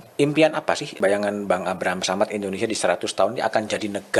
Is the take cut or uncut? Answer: cut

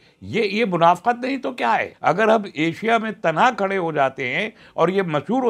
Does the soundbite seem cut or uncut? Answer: cut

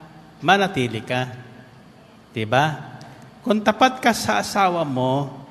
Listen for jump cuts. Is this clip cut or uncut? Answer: uncut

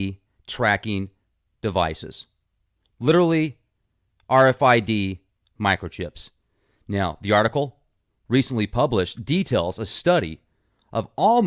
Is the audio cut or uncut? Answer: cut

